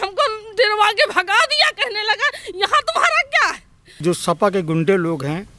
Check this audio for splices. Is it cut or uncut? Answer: cut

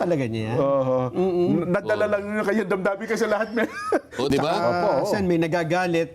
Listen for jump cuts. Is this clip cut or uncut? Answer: cut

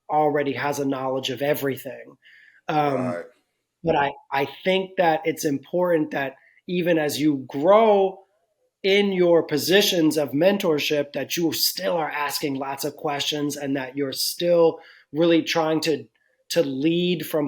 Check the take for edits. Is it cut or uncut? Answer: uncut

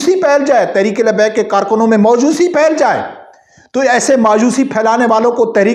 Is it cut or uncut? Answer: uncut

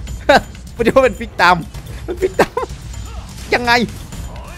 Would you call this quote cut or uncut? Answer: uncut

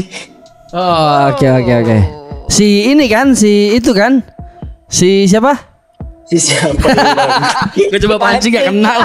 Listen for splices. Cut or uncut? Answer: uncut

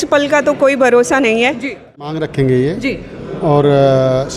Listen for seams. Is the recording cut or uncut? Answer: cut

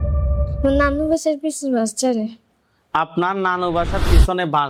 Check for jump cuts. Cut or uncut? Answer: uncut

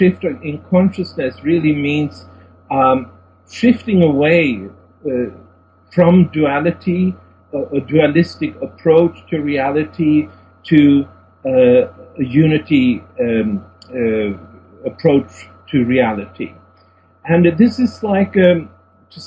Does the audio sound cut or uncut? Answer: uncut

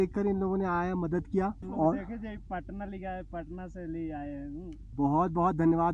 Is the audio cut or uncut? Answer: uncut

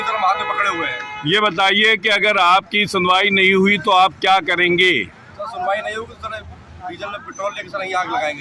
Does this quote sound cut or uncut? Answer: uncut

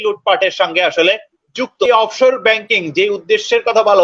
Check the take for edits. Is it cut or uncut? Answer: cut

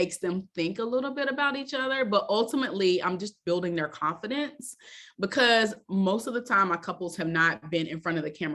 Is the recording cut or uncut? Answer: uncut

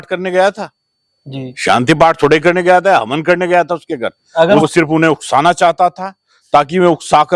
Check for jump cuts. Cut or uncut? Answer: cut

